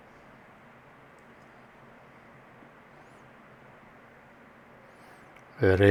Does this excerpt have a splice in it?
no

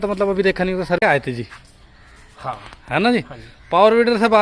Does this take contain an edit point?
yes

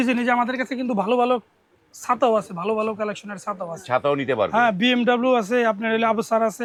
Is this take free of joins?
yes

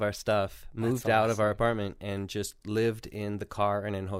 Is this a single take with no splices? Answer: yes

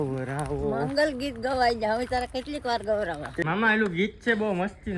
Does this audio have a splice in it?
yes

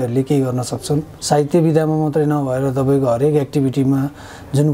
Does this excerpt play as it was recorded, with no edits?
no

